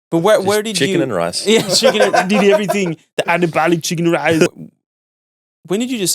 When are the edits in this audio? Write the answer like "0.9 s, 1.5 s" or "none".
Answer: 4.5 s